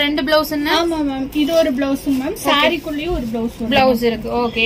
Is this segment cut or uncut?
uncut